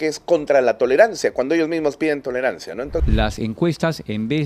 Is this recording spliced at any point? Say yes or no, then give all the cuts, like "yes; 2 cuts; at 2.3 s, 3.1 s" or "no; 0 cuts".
yes; 1 cut; at 3.0 s